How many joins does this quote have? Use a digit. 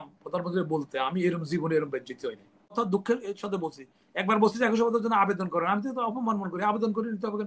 1